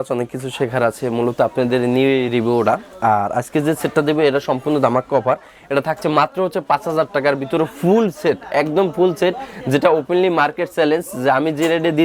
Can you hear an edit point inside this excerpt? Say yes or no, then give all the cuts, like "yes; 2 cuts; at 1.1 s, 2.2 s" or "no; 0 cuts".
no; 0 cuts